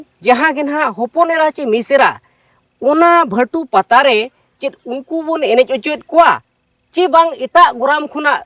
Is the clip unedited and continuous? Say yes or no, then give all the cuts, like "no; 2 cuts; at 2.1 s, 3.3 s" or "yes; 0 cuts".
yes; 0 cuts